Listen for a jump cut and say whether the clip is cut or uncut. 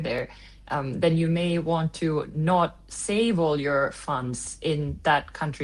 uncut